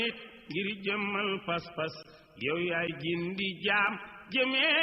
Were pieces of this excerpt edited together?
no; 0 cuts

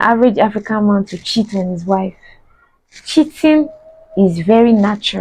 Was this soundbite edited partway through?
no; 0 cuts

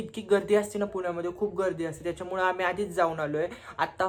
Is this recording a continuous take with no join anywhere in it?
yes; 0 cuts

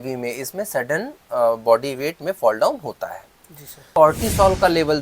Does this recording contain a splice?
yes; 1 cut; at 3.8 s

